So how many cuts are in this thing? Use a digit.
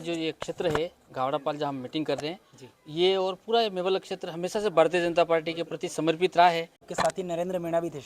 1